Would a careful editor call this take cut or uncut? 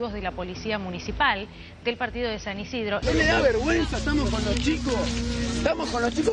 cut